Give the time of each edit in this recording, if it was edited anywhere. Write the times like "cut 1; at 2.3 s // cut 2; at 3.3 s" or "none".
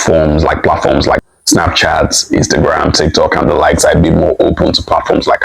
cut 1; at 1.3 s